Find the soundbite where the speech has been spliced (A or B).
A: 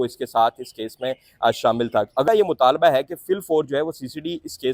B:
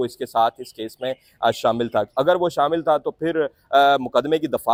A